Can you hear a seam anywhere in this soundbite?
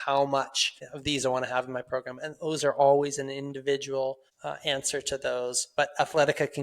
yes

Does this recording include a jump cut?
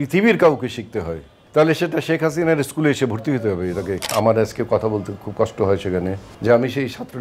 yes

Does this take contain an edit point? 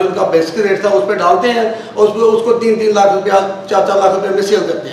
no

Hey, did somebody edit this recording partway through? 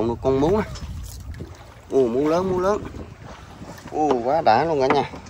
no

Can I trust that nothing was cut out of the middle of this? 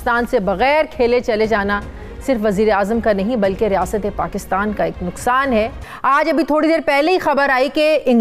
no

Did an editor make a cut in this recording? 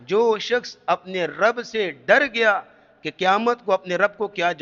no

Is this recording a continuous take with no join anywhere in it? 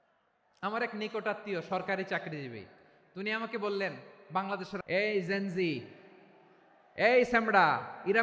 no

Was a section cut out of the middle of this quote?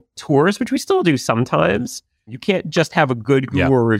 yes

